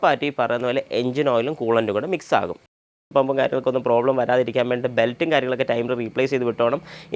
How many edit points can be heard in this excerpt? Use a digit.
1